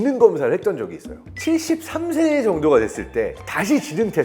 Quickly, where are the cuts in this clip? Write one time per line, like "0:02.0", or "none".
0:01.3